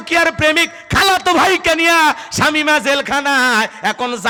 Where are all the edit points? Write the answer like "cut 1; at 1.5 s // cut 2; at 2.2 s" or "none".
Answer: none